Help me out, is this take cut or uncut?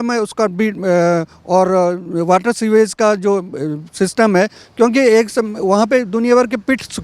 uncut